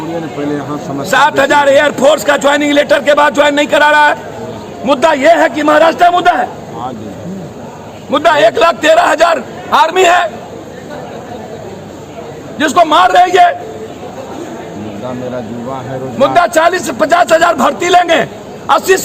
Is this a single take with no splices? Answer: yes; 0 cuts

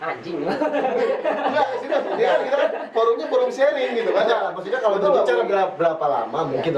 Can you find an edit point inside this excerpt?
no; 0 cuts

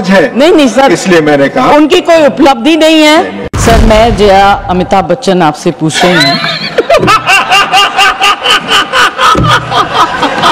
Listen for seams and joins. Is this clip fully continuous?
yes; 0 cuts

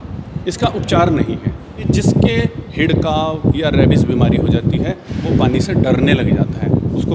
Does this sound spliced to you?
yes; 1 cut; at 1.8 s

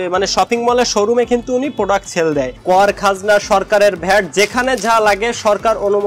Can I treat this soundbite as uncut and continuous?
no; 1 cut; at 2.6 s

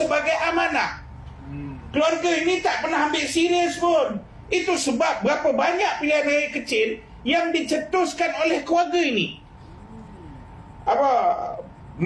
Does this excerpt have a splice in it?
no; 0 cuts

